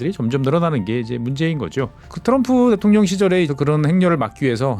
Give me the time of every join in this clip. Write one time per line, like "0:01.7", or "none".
0:02.0
0:03.5